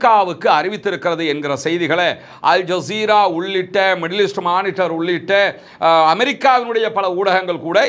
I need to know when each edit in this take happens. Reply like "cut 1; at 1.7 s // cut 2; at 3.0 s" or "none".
none